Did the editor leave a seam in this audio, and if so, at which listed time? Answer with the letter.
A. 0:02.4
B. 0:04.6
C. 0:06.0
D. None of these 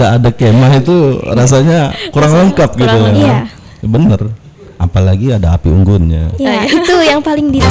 D